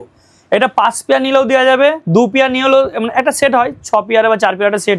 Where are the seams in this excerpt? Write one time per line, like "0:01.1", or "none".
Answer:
none